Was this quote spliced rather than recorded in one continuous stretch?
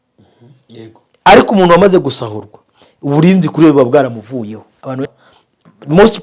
yes; 1 cut; at 5.2 s

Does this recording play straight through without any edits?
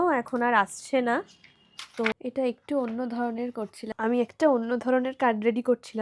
no; 2 cuts; at 2.1 s, 3.9 s

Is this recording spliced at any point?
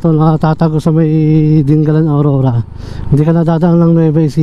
no; 0 cuts

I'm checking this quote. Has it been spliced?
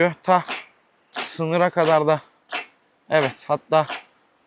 no; 0 cuts

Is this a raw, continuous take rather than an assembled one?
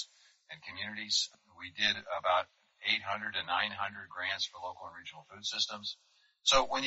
yes; 0 cuts

